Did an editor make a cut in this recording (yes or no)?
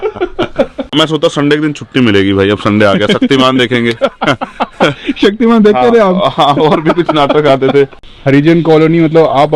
yes